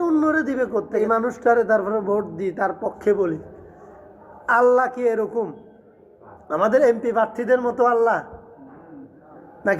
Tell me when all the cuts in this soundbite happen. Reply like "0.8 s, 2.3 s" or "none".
1.0 s